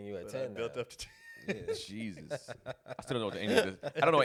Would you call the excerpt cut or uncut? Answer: uncut